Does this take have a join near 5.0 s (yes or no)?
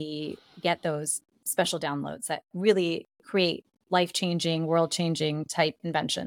no